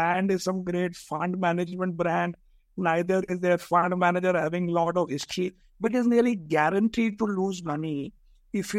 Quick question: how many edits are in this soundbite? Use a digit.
1